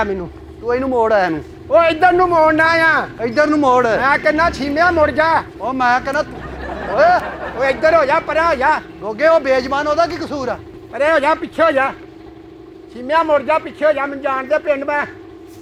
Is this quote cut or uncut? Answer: uncut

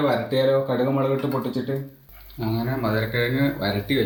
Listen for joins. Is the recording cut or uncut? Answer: uncut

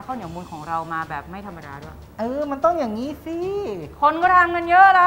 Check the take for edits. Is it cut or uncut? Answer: cut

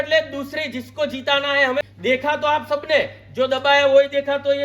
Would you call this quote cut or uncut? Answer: cut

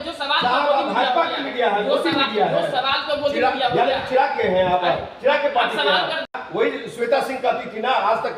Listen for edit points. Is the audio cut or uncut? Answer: cut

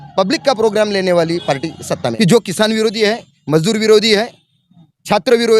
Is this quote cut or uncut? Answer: cut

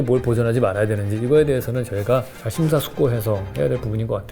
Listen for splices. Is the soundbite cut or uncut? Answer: uncut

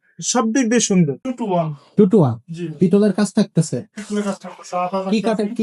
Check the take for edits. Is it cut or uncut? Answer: cut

